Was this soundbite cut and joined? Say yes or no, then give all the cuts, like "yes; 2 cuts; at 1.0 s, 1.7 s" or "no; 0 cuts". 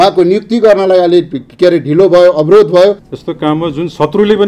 yes; 1 cut; at 3.1 s